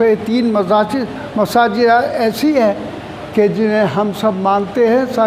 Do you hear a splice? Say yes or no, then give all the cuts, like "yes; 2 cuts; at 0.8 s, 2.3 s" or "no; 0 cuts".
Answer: no; 0 cuts